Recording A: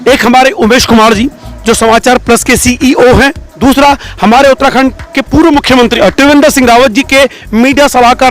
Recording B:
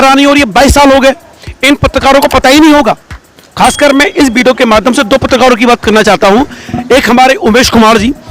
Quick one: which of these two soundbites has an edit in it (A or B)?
A